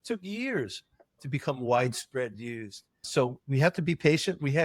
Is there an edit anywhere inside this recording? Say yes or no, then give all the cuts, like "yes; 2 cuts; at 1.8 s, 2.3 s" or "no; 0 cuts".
yes; 2 cuts; at 1.2 s, 3.1 s